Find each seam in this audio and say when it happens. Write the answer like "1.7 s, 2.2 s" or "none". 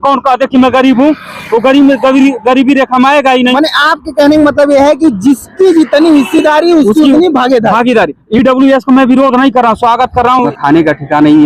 10.5 s